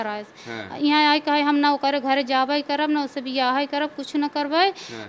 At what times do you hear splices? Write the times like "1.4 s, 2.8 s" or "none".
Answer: none